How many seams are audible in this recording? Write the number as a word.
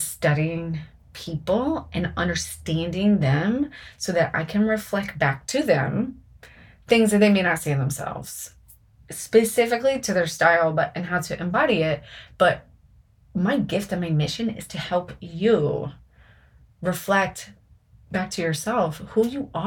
one